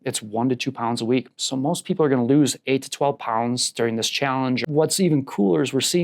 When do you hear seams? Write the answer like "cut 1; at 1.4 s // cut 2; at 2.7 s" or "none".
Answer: cut 1; at 4.6 s